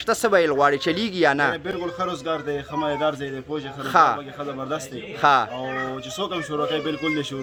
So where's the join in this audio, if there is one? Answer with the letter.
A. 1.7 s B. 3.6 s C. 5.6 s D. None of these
D